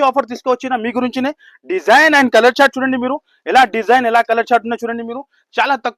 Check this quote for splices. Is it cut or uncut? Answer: uncut